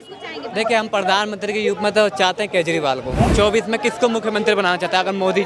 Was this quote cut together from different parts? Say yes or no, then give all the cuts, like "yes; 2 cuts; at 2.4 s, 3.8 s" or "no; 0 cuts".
yes; 1 cut; at 3.3 s